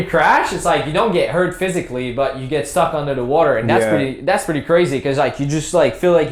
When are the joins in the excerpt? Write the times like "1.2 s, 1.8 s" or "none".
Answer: none